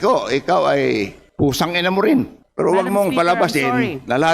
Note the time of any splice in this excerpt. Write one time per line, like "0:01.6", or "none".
0:01.2
0:02.4

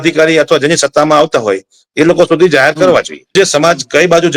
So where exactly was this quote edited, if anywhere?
0:03.3

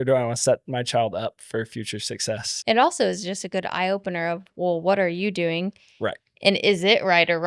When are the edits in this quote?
0:02.5

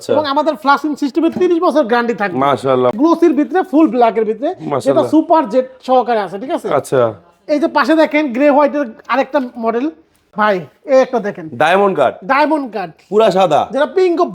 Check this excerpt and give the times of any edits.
0:02.9
0:10.3

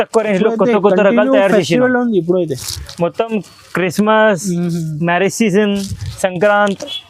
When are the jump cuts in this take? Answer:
none

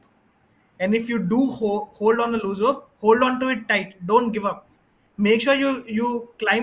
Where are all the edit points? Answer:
none

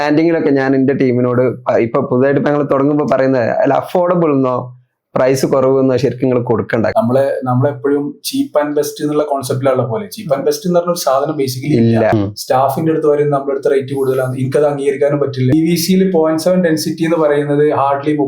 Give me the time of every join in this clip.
0:06.9
0:12.1
0:15.5

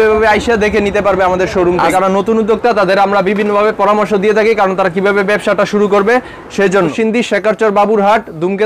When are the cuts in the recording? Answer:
0:01.9
0:06.9

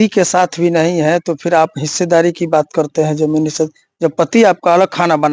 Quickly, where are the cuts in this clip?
none

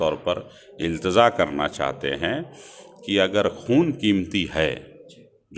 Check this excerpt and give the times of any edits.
none

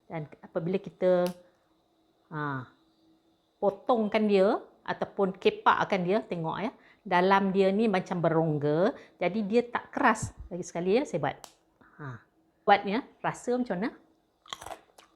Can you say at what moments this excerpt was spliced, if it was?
0:12.5

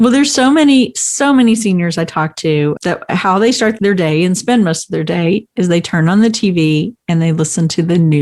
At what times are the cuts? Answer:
0:02.8
0:03.8

